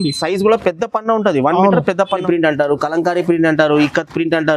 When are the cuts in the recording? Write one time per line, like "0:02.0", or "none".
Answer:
0:02.2